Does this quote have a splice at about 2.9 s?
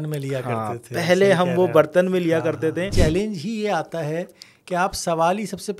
yes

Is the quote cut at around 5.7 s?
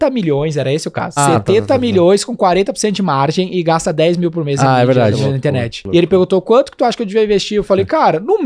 yes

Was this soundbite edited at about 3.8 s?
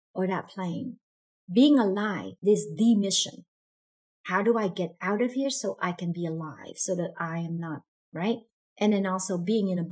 no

